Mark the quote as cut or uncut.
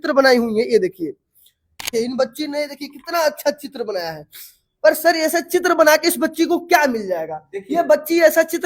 cut